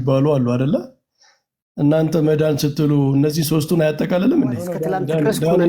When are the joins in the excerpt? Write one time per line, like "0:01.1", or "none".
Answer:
0:04.8